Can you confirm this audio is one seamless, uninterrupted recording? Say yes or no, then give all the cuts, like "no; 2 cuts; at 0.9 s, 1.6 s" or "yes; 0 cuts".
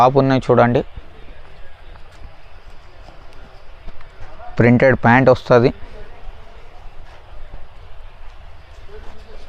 yes; 0 cuts